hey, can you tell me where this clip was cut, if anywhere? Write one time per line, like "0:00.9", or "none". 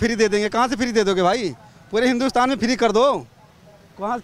none

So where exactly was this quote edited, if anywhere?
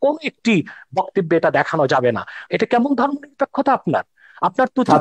0:02.4

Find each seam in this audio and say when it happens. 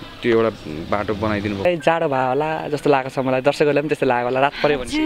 0:01.6

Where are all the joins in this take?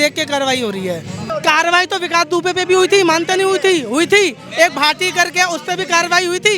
0:01.2

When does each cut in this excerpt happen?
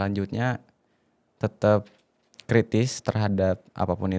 none

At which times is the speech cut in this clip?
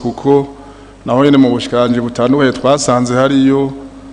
none

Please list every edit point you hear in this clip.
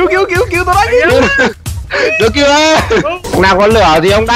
0:03.2

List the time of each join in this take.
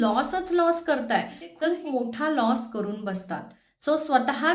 0:01.5

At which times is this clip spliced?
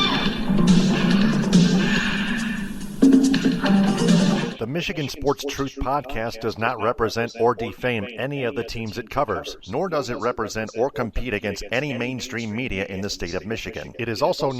0:04.5

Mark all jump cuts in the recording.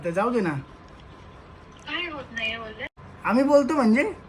0:03.0

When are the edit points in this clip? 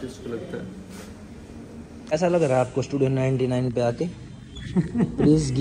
0:01.9

